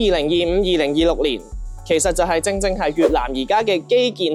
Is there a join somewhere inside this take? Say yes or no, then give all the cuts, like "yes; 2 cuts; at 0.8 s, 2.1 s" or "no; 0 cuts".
no; 0 cuts